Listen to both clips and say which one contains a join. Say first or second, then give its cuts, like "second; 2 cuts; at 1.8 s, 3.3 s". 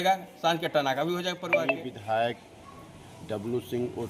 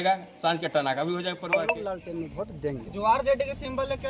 second; 1 cut; at 1.8 s